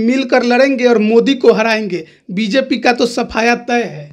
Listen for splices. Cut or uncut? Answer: uncut